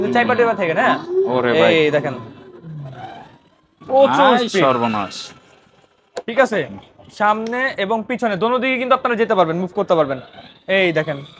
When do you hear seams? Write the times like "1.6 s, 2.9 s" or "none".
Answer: none